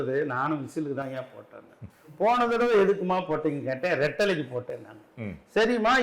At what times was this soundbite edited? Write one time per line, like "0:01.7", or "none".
none